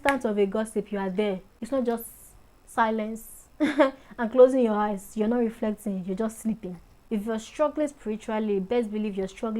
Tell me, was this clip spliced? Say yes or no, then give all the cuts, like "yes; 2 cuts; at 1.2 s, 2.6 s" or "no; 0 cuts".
yes; 2 cuts; at 1.5 s, 7.0 s